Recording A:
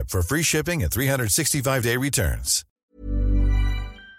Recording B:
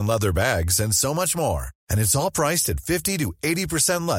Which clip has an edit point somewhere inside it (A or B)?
A